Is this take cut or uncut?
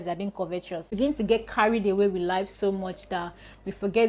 cut